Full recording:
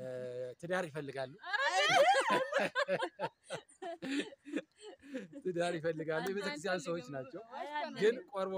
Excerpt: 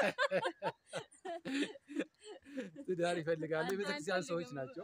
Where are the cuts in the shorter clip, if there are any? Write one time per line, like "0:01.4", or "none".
none